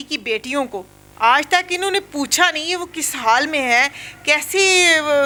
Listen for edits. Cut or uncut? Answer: uncut